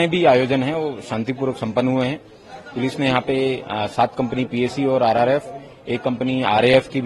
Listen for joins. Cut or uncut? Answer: uncut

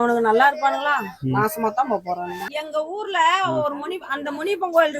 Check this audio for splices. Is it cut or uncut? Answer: cut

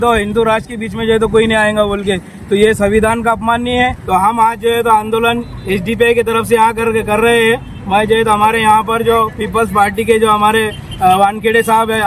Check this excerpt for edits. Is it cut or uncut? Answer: uncut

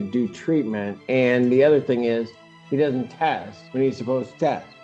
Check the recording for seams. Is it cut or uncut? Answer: cut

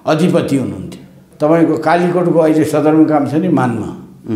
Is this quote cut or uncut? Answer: cut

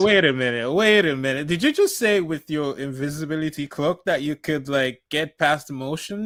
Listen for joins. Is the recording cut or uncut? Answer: uncut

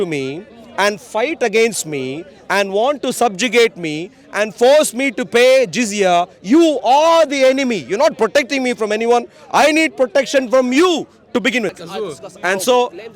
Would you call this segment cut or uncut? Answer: cut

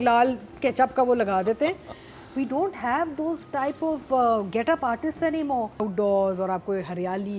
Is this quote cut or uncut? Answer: cut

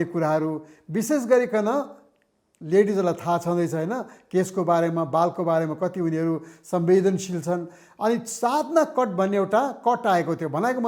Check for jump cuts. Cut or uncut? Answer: uncut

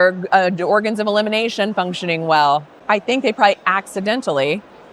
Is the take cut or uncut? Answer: cut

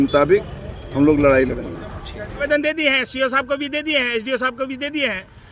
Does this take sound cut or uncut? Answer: cut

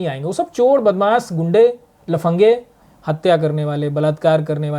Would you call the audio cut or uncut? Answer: cut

